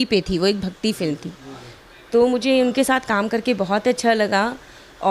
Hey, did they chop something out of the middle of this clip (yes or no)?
no